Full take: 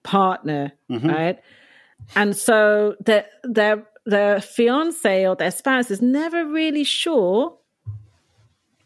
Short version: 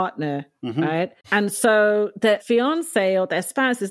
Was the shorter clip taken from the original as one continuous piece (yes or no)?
no